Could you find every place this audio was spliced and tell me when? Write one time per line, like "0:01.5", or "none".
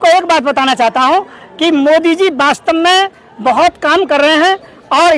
0:01.4